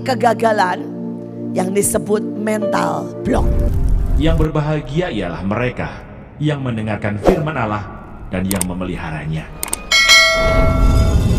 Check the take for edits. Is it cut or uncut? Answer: cut